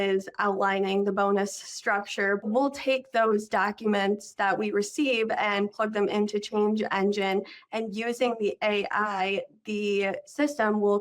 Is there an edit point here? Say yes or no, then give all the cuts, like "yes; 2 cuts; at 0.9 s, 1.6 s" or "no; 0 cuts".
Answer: yes; 1 cut; at 2.4 s